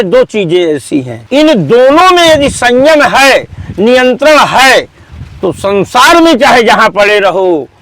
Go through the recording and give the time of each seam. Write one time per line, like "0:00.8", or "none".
0:01.2